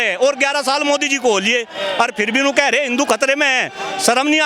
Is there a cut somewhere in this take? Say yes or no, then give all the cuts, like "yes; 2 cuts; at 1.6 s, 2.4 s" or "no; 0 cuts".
no; 0 cuts